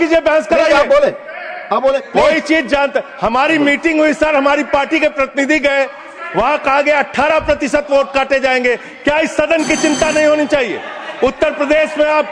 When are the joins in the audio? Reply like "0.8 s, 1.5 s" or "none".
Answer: none